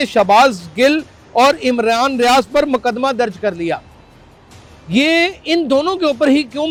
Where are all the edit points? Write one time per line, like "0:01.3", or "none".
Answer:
none